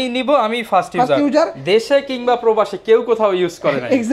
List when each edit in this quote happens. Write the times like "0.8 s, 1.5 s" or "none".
none